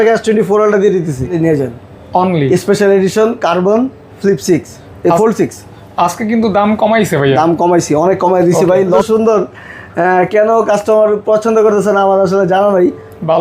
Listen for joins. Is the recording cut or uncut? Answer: cut